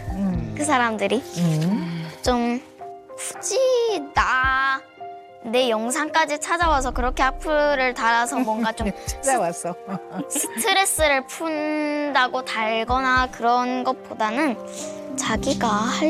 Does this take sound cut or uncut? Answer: uncut